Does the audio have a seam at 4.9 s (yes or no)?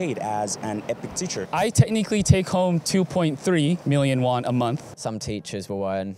yes